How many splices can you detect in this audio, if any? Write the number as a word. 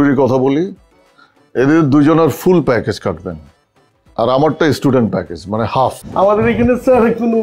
one